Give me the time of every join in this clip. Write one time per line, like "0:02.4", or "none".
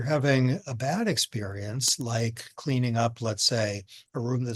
none